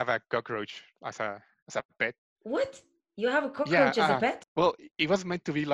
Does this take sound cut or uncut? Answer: cut